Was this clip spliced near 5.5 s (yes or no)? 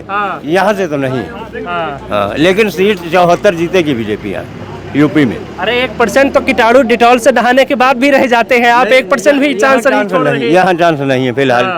no